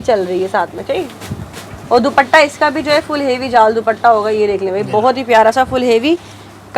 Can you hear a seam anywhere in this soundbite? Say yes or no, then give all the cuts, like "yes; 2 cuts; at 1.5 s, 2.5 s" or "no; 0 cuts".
no; 0 cuts